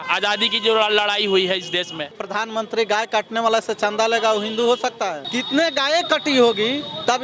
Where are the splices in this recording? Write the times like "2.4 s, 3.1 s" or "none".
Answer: 2.2 s, 5.3 s